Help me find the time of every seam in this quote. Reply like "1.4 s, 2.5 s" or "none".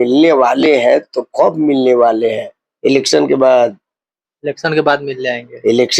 none